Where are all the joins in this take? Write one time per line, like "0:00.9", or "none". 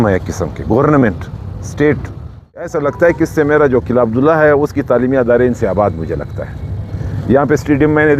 0:02.7